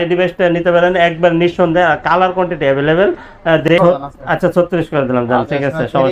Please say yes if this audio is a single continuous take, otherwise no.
no